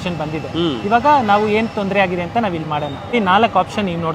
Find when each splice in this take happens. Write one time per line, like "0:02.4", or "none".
none